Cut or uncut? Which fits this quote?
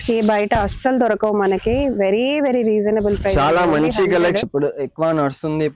cut